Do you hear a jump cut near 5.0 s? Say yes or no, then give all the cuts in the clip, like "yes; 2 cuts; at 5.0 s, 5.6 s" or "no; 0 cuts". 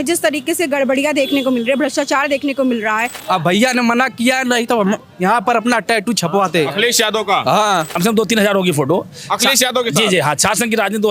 no; 2 cuts; at 3.1 s, 7.9 s